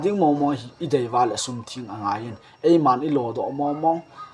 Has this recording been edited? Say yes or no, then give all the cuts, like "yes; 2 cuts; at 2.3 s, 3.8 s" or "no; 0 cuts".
no; 0 cuts